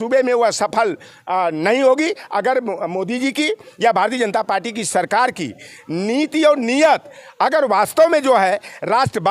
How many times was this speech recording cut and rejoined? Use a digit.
0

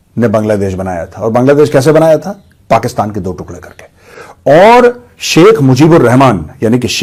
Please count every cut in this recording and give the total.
0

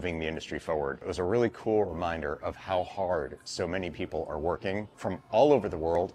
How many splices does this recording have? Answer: 2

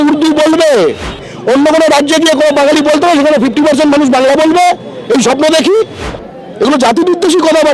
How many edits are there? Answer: 2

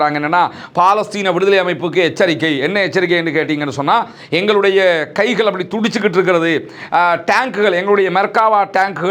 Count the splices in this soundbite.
0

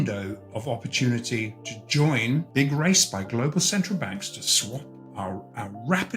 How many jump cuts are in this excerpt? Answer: 1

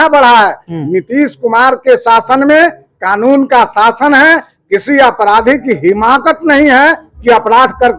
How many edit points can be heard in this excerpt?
0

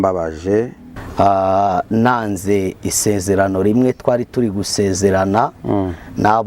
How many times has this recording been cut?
1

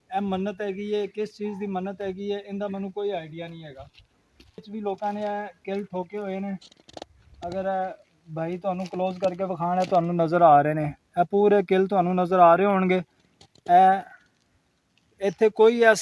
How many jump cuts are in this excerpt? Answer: 1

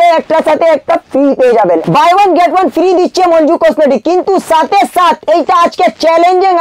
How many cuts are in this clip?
1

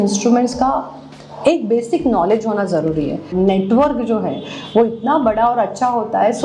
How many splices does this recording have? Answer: 1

